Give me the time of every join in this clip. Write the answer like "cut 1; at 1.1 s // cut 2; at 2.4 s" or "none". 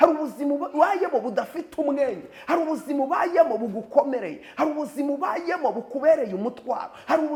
none